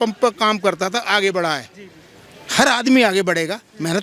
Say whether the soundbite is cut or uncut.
uncut